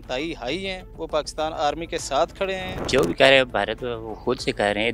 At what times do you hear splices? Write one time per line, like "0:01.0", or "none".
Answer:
0:02.7